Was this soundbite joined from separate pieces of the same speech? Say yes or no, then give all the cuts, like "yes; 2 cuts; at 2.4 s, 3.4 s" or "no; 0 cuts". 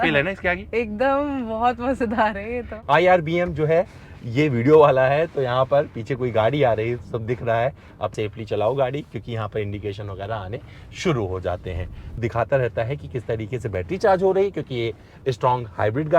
yes; 3 cuts; at 2.7 s, 8.1 s, 12.2 s